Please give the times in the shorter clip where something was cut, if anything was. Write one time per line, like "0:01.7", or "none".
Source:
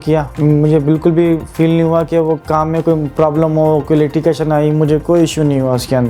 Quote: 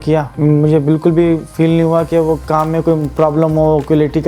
none

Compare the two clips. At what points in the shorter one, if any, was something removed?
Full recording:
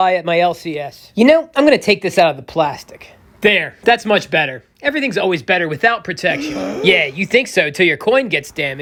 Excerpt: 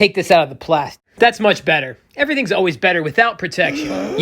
0:01.0

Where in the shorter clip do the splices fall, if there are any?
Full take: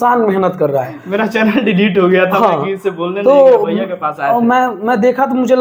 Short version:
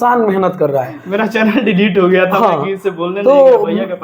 none

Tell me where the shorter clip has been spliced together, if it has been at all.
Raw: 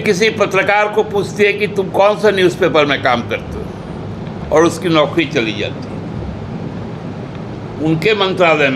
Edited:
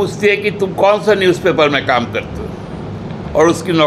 none

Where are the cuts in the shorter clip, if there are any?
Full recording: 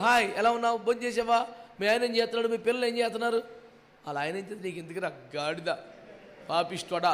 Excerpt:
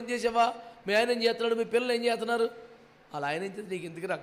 none

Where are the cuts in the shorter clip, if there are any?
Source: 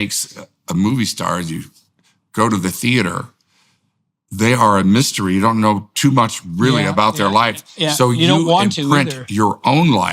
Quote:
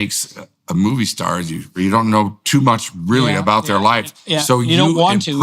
0:01.7

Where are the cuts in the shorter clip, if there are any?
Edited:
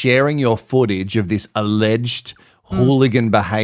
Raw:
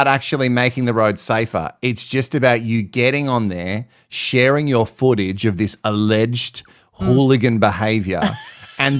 none

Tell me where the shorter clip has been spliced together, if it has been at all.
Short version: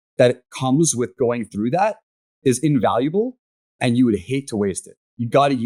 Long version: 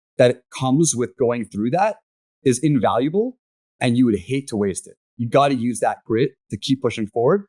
none

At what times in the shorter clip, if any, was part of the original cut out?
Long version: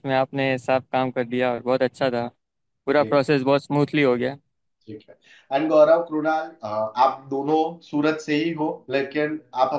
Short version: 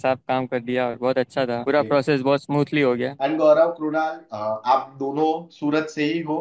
0:01.6
0:03.1

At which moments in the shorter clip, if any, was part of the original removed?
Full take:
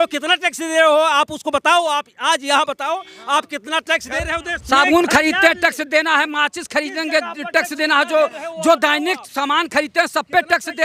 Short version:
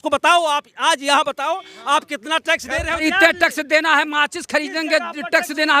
0:03.0

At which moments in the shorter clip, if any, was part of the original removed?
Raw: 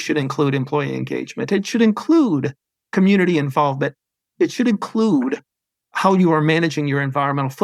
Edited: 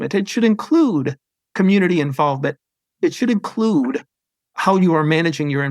none

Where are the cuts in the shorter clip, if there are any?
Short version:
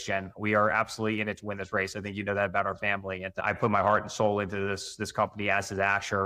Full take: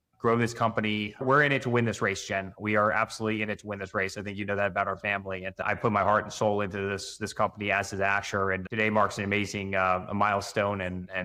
none

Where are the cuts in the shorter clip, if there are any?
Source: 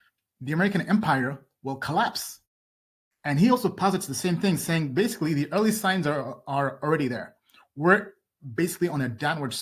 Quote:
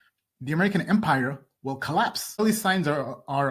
0:02.4

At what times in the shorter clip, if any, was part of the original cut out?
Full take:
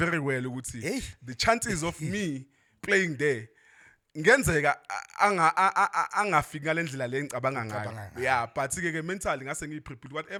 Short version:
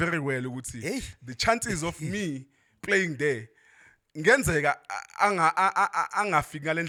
none

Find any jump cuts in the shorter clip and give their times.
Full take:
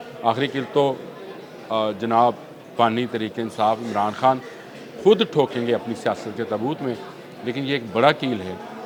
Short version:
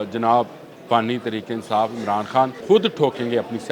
0:02.6

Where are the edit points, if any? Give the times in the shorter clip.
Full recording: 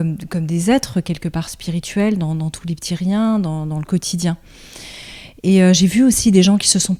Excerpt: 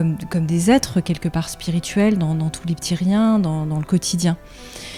none

